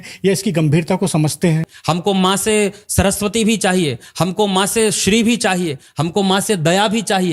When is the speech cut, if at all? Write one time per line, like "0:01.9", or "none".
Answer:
0:01.7